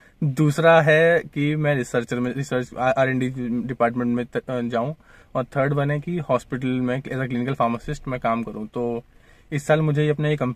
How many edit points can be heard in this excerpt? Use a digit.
0